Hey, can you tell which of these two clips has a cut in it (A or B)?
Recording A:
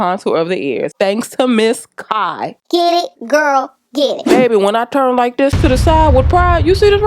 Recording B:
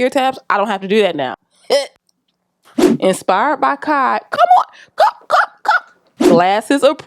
A